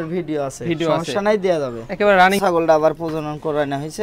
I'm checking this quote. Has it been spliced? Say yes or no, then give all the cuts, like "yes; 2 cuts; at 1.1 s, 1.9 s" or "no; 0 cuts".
yes; 1 cut; at 2.4 s